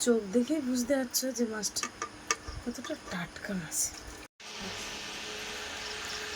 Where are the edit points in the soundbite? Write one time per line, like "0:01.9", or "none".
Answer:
0:04.2

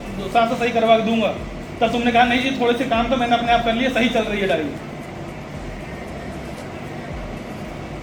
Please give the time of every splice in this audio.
none

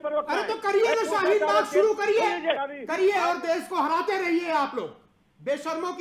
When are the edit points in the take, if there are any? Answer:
0:02.7

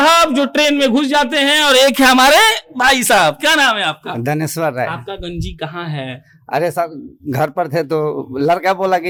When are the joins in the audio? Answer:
none

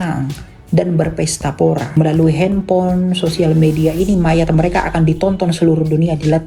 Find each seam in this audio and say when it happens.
0:02.0

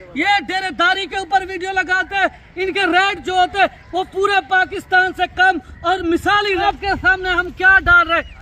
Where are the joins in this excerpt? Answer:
0:06.6

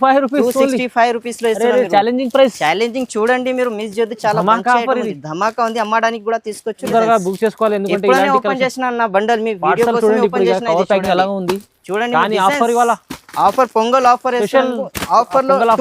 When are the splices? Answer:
0:06.9

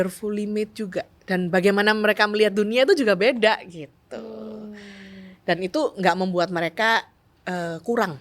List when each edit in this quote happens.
0:01.1

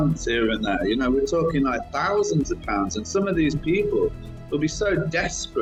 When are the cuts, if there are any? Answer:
none

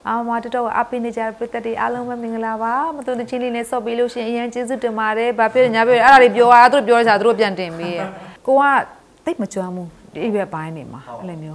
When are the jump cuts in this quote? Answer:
0:08.3

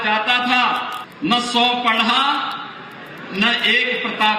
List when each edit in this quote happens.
0:01.0

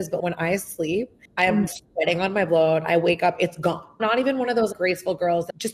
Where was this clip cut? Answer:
0:01.2

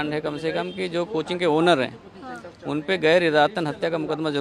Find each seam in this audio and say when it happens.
none

